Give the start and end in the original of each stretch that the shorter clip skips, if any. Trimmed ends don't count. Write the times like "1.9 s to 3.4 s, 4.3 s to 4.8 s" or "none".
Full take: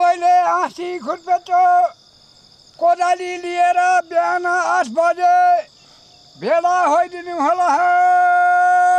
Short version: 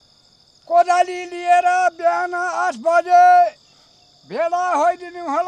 none